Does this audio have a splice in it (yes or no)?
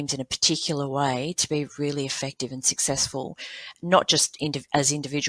no